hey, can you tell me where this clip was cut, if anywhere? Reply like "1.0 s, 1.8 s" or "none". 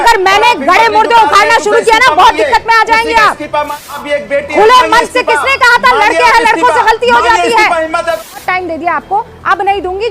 4.0 s, 8.3 s